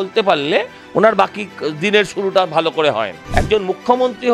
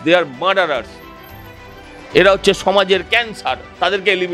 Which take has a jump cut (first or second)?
first